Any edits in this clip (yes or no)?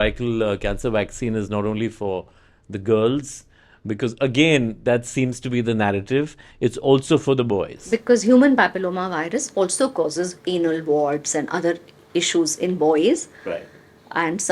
no